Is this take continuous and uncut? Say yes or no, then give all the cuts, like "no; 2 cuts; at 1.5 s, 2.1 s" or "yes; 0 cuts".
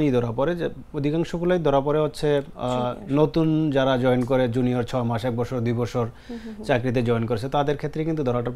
yes; 0 cuts